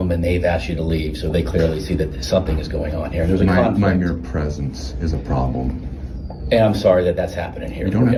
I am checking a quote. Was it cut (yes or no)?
no